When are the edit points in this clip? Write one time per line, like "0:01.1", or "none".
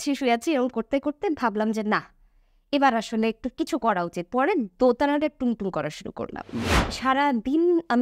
0:06.8